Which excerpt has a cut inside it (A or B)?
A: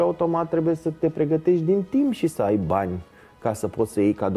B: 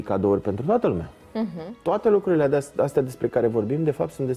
B